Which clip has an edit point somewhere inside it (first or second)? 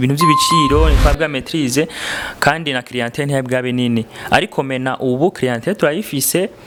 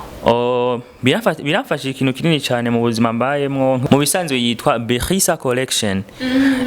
second